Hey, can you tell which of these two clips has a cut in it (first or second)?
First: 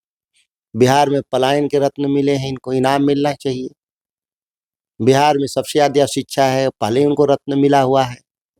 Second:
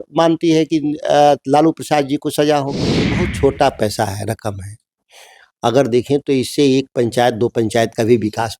second